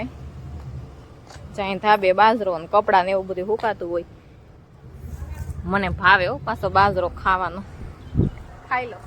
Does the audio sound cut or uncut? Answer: uncut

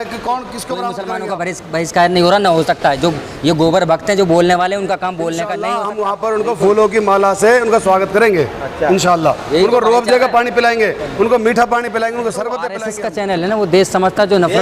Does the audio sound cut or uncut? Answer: cut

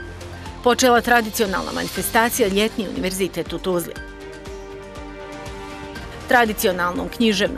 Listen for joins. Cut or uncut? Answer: cut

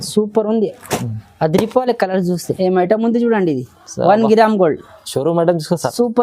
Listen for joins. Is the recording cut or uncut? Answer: cut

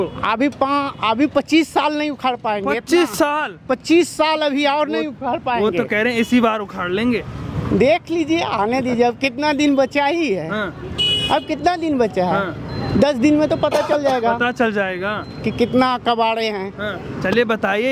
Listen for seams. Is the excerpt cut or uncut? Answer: uncut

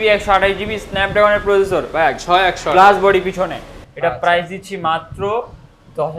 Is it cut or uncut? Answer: uncut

